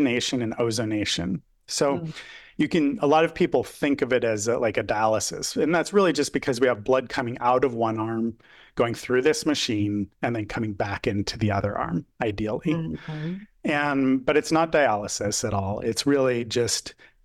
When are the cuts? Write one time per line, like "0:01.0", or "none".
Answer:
none

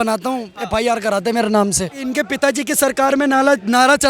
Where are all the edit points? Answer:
0:02.0

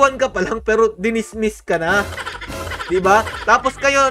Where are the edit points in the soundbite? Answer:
none

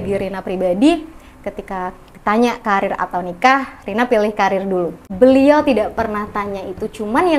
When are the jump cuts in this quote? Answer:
0:05.0

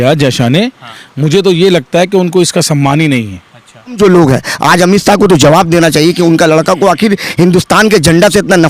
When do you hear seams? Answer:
0:04.0

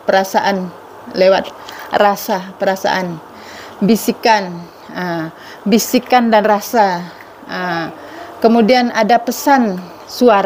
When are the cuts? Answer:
none

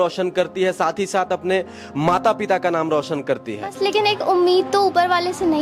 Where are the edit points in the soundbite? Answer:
0:03.7

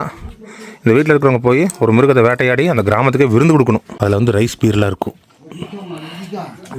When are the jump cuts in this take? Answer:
0:03.9

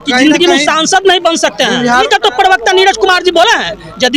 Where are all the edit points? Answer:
0:02.0

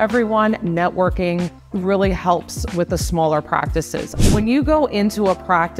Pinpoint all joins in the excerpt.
0:01.6
0:04.0

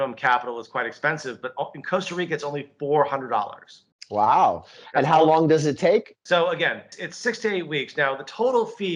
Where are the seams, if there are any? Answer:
none

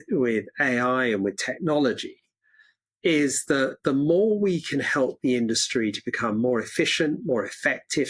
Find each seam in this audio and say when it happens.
none

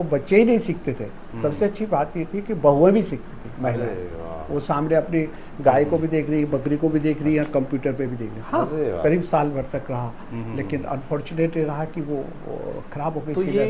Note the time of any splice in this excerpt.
none

